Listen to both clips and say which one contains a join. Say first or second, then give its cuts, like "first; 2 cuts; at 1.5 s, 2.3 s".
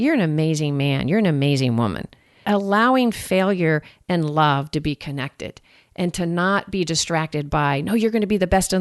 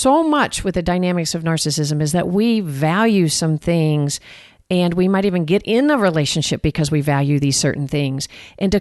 first; 1 cut; at 2.4 s